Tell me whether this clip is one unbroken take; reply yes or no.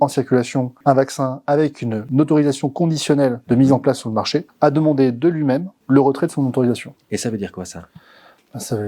yes